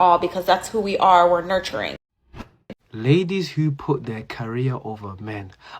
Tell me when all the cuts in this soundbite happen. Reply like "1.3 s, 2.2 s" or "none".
2.4 s